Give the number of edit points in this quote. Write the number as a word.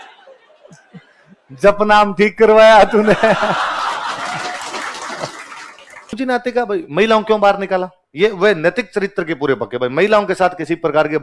one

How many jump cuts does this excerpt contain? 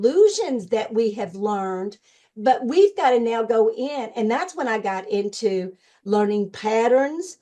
zero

